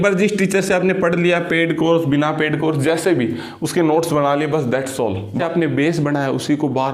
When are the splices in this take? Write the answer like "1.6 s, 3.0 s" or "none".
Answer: 5.4 s